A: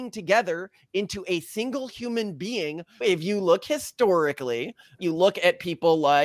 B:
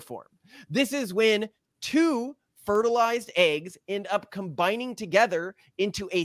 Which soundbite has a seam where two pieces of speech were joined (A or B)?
A